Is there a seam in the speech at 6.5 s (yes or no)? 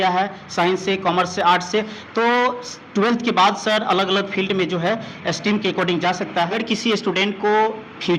yes